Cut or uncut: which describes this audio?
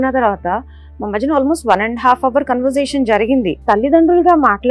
cut